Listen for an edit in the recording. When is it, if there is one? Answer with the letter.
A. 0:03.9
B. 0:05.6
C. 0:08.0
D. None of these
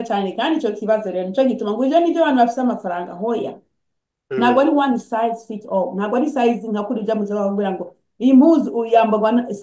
D